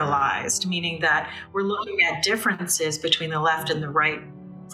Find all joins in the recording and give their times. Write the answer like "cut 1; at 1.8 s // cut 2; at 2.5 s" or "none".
none